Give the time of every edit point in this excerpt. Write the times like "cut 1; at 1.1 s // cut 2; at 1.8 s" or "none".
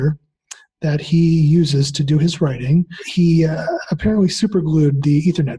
cut 1; at 3.0 s